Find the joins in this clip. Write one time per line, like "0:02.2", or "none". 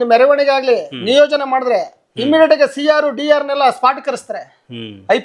none